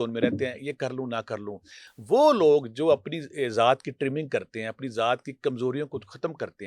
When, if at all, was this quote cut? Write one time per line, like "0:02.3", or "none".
none